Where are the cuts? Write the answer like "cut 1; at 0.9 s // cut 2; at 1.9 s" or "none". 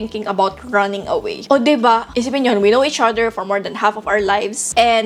none